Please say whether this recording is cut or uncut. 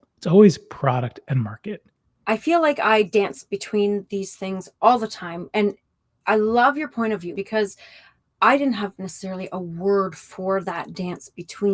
cut